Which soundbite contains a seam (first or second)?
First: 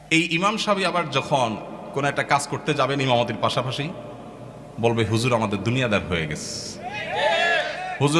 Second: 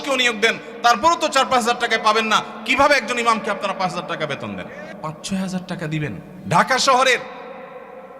second